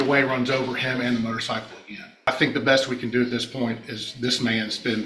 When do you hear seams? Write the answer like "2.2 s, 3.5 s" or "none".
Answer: 2.3 s